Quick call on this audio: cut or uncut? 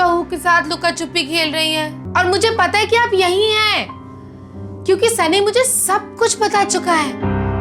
cut